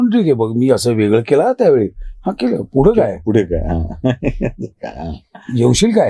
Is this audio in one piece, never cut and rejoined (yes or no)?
yes